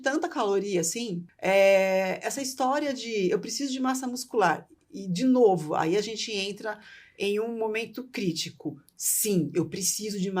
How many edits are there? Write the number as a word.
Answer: one